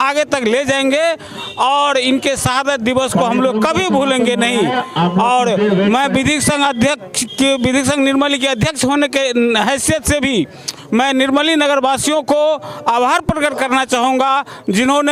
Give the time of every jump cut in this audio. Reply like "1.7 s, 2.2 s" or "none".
none